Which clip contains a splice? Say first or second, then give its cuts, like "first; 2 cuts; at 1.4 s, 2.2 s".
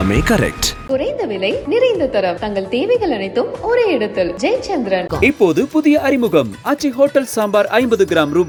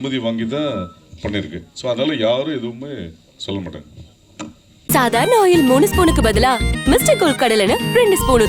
second; 1 cut; at 4.7 s